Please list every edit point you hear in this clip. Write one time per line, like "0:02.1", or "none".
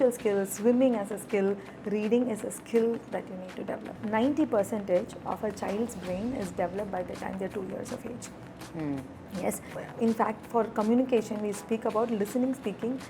0:04.0
0:09.8